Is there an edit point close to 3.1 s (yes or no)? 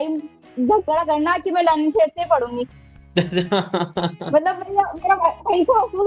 no